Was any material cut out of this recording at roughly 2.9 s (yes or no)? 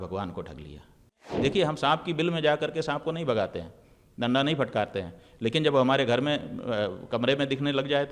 no